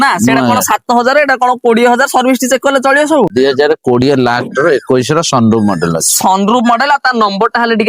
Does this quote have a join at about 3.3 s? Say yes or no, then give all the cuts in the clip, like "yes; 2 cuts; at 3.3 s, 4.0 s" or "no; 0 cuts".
yes; 1 cut; at 3.3 s